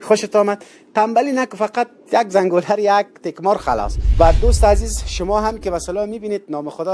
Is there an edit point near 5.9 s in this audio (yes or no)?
no